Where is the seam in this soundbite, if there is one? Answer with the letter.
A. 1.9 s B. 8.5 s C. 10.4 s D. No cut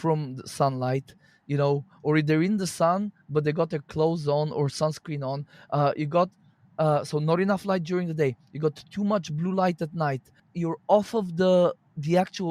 C